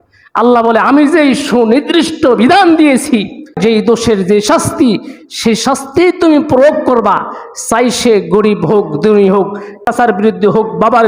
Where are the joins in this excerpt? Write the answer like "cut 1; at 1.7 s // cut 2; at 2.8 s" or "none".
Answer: cut 1; at 3.6 s // cut 2; at 9.8 s